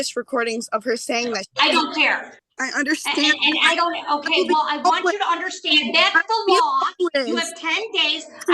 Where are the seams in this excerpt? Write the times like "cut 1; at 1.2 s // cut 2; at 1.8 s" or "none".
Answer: cut 1; at 2.3 s